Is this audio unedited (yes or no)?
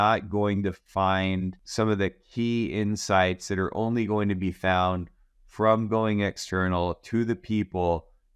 no